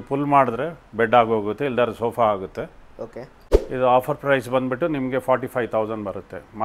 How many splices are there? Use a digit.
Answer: 1